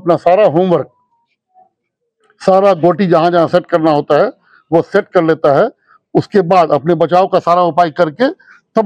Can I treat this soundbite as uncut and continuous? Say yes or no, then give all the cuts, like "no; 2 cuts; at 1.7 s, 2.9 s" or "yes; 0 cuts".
yes; 0 cuts